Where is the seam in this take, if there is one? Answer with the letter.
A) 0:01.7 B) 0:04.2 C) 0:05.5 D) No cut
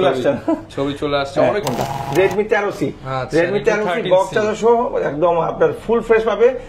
A